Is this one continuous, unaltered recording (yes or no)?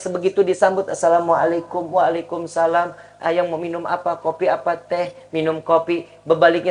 yes